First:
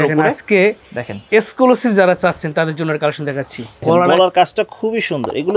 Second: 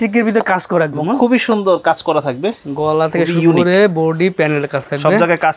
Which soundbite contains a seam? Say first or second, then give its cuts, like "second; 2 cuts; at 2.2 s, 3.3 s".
first; 1 cut; at 3.8 s